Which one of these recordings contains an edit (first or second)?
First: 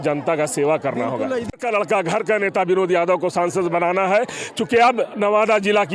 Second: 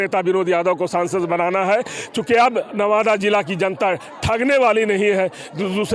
first